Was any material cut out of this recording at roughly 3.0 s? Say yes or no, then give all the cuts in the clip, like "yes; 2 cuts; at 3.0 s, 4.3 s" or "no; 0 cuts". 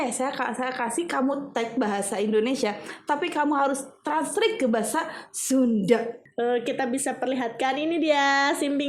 no; 1 cut; at 6.2 s